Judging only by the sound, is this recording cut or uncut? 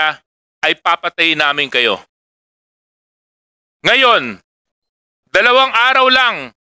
uncut